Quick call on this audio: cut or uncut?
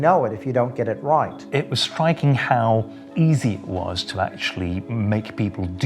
cut